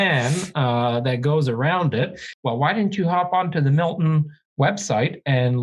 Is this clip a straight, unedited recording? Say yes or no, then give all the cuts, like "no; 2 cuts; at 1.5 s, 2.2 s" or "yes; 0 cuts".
no; 1 cut; at 2.2 s